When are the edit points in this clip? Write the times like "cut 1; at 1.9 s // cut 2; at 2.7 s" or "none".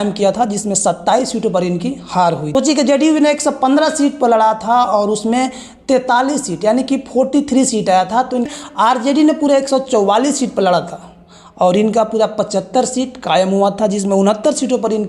cut 1; at 2.5 s // cut 2; at 8.5 s